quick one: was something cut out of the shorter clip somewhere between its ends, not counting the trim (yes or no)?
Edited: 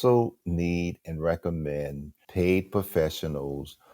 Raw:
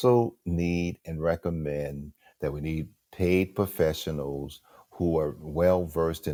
yes